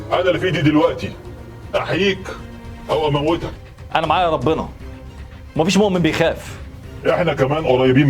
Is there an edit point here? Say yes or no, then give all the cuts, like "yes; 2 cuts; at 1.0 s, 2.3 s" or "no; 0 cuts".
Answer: yes; 1 cut; at 3.6 s